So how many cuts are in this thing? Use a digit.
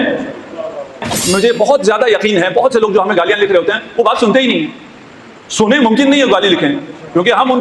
1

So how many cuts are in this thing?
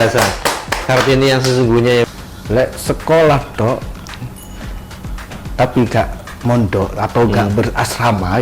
1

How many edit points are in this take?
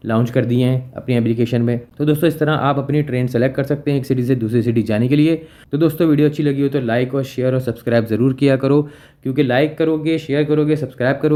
0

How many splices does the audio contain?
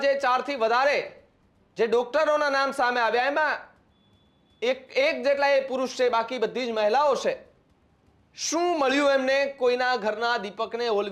0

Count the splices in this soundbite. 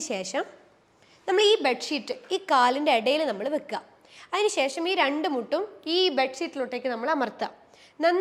0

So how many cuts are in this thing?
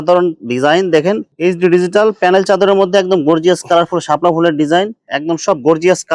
1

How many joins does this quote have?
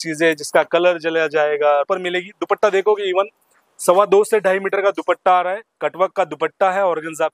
1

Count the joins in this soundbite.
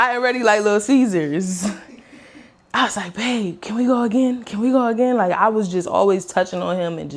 0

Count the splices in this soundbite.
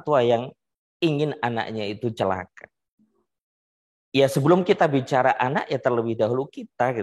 0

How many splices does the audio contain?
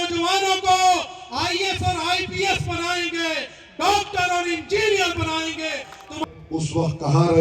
1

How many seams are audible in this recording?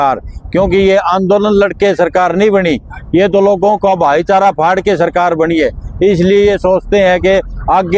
0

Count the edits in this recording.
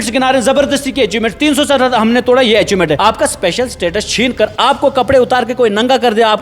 1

